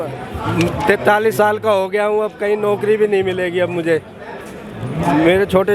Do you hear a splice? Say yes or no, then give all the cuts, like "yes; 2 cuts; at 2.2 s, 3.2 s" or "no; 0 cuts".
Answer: no; 0 cuts